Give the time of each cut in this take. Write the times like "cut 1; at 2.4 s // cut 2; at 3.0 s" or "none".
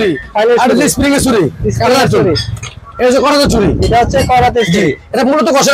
none